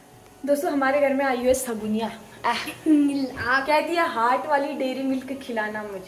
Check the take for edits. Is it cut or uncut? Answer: uncut